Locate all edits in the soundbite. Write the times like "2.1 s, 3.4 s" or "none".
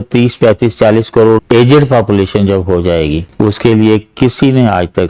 1.4 s, 3.2 s